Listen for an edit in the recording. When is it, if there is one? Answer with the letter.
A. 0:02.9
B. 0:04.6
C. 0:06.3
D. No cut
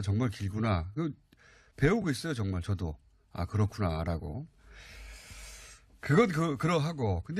A